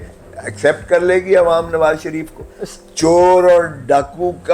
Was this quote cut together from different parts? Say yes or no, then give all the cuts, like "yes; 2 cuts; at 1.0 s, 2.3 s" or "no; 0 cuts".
no; 0 cuts